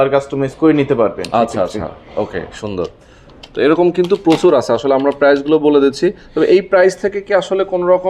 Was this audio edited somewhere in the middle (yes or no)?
no